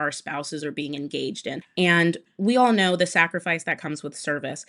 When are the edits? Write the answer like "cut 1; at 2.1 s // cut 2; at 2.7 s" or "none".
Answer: cut 1; at 1.6 s